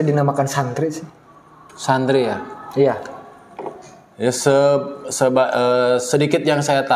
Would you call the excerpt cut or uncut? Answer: uncut